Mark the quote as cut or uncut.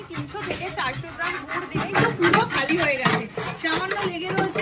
cut